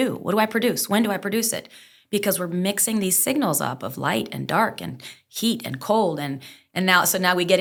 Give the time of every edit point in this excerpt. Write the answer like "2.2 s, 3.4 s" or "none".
none